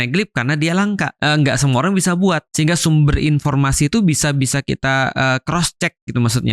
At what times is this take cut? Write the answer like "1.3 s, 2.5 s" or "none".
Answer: 1.2 s, 2.5 s